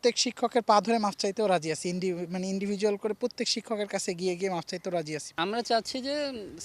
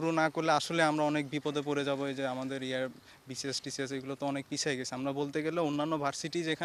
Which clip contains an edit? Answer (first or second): first